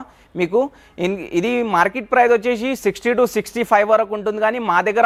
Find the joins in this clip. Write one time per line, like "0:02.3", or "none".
none

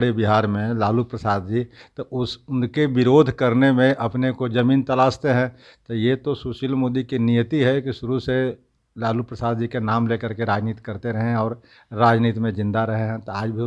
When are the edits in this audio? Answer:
none

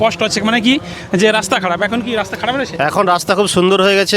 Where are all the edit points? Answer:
0:00.9

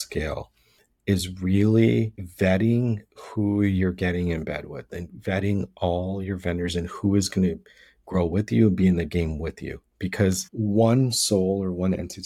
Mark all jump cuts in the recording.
0:02.2
0:10.5

